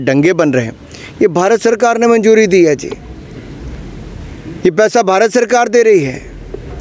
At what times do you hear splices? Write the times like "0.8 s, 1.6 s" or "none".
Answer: none